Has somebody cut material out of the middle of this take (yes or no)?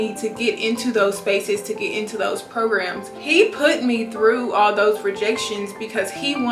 no